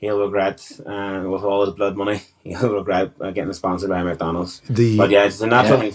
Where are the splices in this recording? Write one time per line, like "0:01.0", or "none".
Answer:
none